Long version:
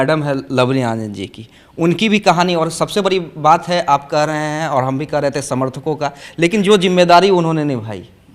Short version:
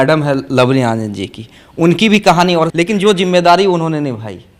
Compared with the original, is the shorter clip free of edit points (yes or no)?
no